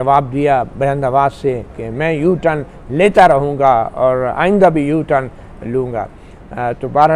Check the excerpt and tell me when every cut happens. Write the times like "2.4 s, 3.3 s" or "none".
none